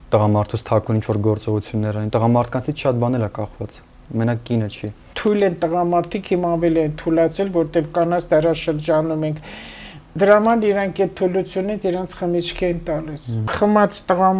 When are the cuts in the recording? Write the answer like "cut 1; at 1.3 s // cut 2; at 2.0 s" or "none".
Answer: cut 1; at 5.0 s // cut 2; at 13.5 s